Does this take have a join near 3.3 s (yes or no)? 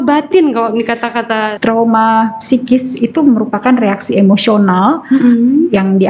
no